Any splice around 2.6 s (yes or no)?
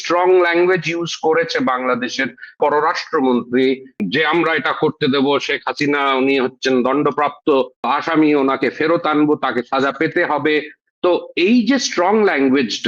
yes